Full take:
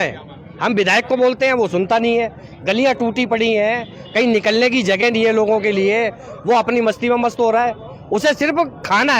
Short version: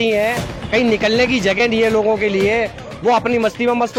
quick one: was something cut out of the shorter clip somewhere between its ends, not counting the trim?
no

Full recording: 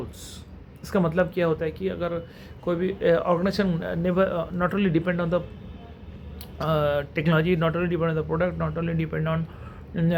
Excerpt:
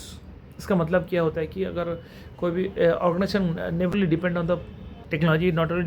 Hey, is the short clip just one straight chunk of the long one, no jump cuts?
no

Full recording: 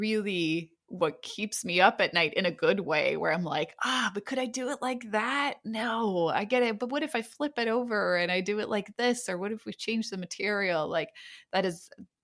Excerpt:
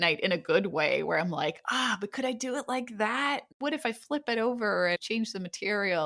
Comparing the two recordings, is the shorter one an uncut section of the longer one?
no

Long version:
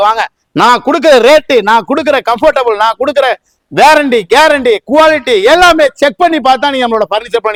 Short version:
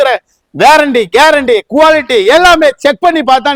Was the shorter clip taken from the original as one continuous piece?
yes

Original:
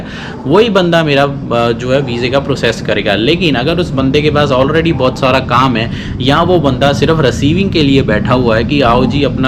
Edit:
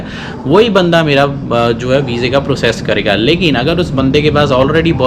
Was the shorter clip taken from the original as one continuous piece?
yes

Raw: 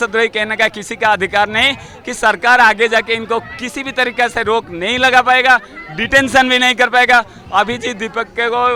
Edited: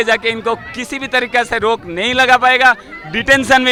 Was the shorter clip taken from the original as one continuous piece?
yes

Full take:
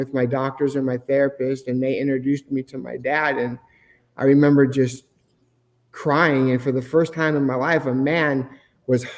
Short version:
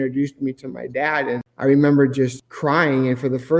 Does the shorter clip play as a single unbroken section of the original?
no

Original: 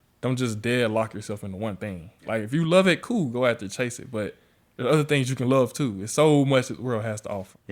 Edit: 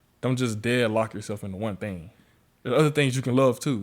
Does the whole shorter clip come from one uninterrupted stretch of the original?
no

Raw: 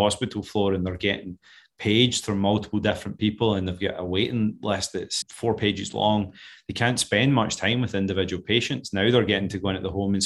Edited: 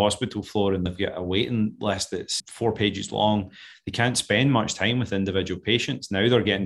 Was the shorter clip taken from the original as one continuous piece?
no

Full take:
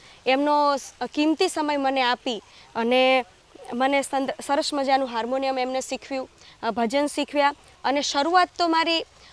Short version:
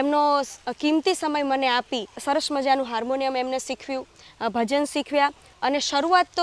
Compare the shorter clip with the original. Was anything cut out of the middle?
yes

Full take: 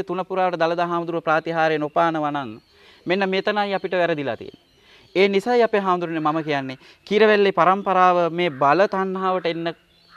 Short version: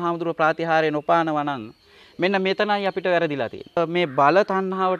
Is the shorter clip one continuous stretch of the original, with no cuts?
no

